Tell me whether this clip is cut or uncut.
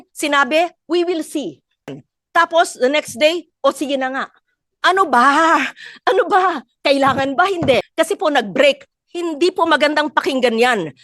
cut